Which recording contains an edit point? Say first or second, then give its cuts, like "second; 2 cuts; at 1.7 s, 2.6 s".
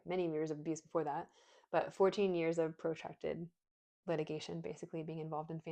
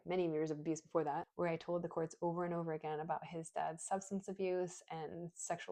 second; 1 cut; at 1.3 s